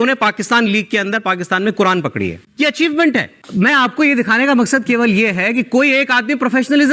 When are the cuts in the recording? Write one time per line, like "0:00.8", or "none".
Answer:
0:03.4